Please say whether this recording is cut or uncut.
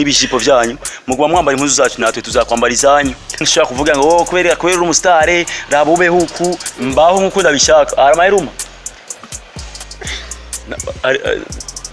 cut